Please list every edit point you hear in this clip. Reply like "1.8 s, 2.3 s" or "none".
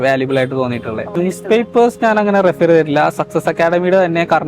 1.2 s